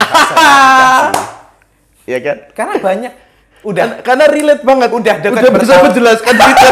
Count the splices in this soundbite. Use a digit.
0